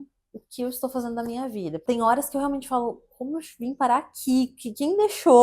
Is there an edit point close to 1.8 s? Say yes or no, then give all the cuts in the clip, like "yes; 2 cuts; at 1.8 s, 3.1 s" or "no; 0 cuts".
yes; 1 cut; at 1.8 s